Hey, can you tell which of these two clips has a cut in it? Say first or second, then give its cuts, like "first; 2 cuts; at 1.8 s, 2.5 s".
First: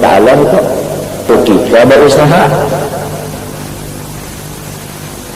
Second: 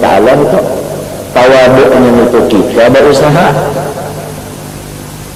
first; 1 cut; at 1.3 s